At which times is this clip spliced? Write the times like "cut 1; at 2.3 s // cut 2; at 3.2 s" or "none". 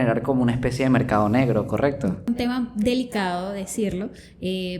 cut 1; at 2.3 s